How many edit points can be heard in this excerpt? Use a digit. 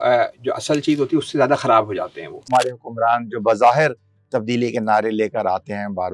1